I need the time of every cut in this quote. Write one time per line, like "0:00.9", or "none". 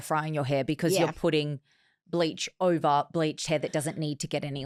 none